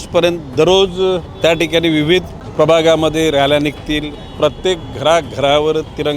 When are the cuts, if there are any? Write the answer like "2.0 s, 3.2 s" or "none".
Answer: 1.3 s, 2.4 s, 4.2 s